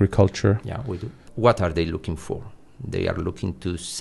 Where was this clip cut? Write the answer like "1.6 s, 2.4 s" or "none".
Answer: 1.3 s